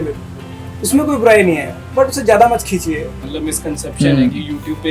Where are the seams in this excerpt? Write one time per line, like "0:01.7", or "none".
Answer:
0:03.2